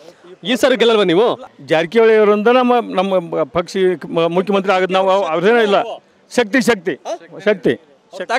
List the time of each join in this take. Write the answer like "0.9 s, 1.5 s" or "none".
1.5 s